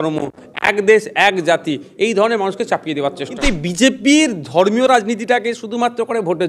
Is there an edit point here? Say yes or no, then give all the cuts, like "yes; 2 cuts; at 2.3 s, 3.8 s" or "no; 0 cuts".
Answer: yes; 1 cut; at 3.3 s